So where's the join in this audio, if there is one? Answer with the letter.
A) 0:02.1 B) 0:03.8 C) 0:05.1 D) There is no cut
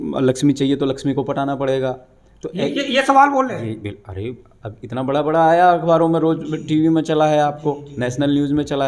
D